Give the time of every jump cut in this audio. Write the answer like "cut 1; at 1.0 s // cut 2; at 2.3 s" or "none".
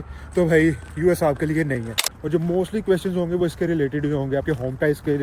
cut 1; at 2.2 s